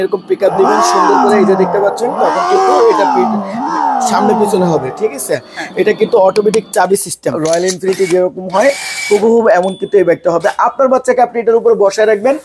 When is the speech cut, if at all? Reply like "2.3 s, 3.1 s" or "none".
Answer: 7.4 s